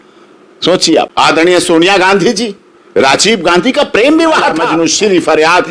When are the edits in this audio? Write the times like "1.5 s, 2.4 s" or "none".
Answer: 1.1 s, 4.7 s